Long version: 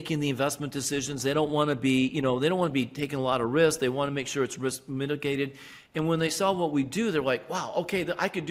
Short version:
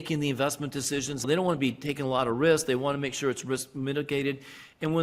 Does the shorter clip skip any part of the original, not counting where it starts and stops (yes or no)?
yes